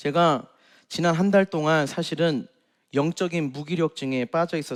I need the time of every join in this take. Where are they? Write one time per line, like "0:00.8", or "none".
none